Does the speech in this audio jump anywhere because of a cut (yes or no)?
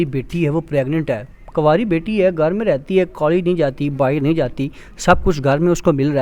no